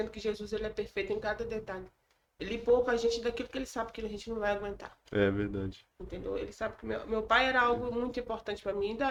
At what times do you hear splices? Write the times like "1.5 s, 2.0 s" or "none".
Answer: none